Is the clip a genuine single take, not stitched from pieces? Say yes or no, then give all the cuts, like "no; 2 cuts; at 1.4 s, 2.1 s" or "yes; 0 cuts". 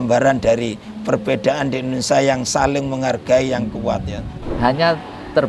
no; 1 cut; at 4.4 s